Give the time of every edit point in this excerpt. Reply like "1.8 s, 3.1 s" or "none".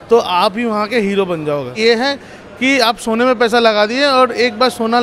1.8 s